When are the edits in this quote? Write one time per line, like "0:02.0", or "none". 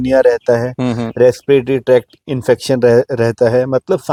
none